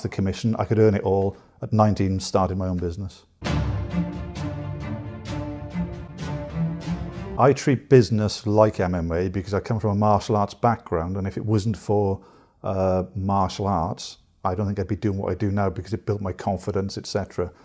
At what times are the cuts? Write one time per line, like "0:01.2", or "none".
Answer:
0:15.4